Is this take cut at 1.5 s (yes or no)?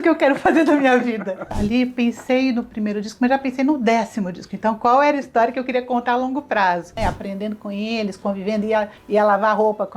yes